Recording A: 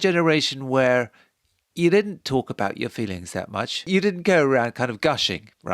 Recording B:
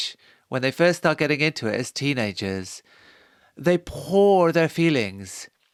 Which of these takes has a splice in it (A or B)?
A